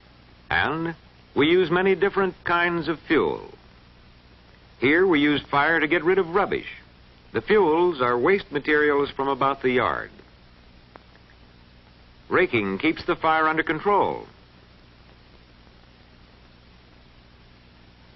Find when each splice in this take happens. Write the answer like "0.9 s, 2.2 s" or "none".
4.4 s